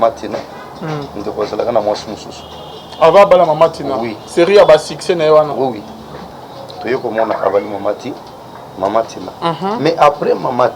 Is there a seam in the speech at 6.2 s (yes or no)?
yes